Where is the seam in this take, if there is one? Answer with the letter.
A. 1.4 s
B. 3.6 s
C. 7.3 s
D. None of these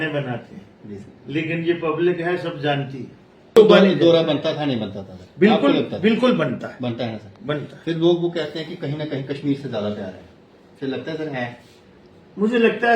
B